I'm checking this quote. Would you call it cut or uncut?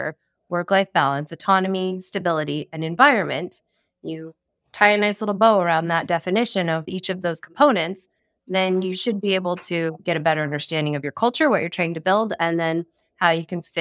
cut